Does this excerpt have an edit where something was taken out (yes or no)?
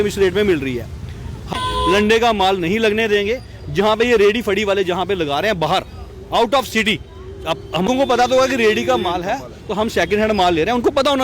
yes